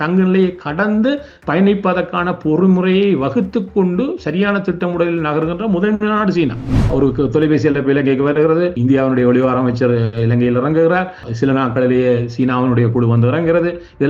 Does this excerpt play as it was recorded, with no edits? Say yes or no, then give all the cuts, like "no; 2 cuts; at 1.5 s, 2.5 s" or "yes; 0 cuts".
no; 3 cuts; at 6.7 s, 8.8 s, 11.2 s